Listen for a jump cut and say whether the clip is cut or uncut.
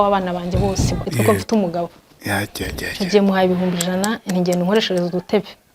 cut